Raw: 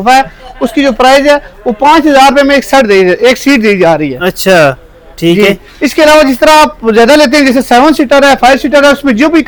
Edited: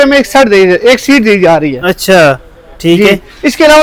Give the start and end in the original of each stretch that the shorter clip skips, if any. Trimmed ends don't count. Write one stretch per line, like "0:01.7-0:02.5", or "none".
none